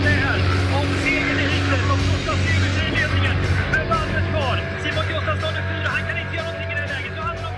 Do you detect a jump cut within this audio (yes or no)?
no